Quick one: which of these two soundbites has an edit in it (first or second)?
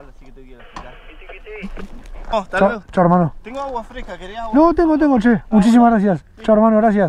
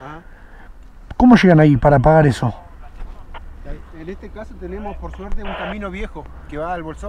first